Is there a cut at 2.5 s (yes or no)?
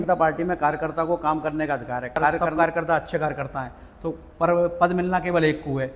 yes